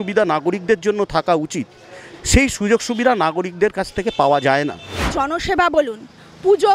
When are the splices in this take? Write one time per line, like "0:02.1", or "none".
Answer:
0:05.1